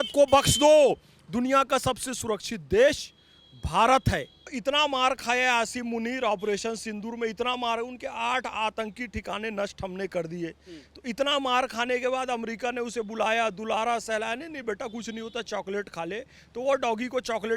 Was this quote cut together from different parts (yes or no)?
yes